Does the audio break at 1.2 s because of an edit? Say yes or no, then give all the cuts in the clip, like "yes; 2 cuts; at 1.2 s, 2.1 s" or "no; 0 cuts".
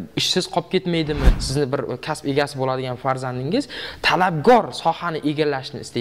yes; 1 cut; at 1.2 s